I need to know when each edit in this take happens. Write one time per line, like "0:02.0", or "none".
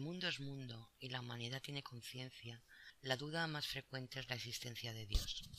0:02.8